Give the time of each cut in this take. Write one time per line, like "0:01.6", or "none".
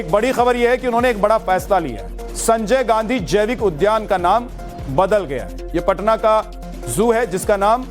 0:05.6

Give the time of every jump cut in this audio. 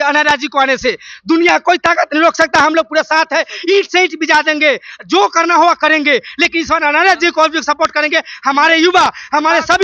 none

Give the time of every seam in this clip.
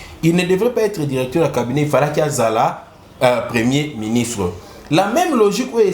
none

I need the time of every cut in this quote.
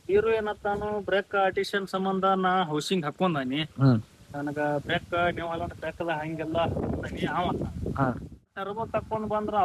0:08.6

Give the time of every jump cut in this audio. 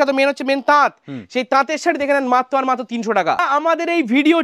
0:03.4

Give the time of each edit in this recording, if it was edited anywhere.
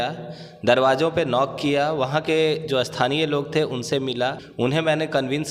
0:04.4

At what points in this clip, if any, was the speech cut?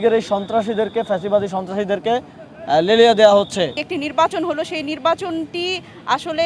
0:03.8

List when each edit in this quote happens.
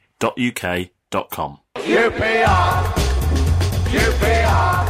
0:01.6

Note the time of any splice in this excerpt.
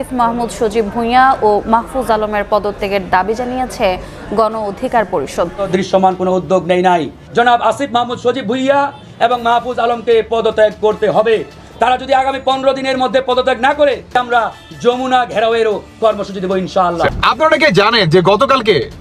0:05.6
0:17.1

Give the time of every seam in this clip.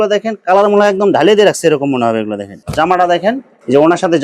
0:02.6

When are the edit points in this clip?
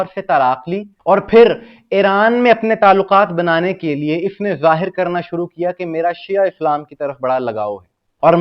none

